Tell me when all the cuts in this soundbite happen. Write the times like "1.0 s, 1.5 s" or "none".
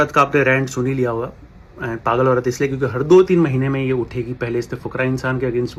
none